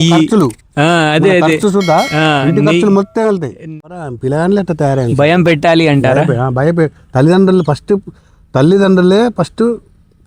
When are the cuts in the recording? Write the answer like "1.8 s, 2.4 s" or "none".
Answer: 3.6 s

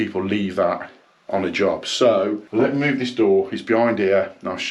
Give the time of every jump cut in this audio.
2.4 s

